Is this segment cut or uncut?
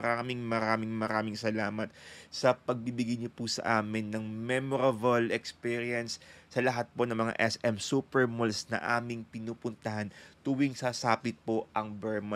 uncut